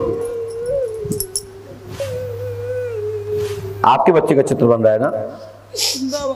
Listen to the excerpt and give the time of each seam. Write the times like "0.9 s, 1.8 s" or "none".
2.0 s